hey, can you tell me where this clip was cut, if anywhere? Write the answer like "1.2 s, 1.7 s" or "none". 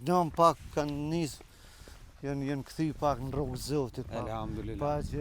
none